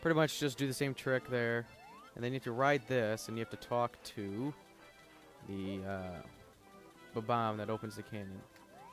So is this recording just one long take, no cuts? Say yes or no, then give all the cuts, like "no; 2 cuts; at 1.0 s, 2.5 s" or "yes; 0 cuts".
no; 1 cut; at 7.9 s